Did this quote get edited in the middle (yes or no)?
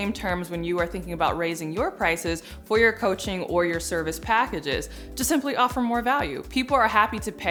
no